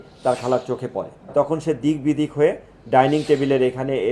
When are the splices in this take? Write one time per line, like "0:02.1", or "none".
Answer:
0:01.1